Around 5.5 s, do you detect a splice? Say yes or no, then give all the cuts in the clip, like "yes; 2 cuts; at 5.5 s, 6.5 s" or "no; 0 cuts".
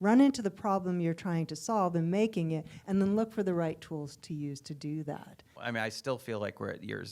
yes; 1 cut; at 5.5 s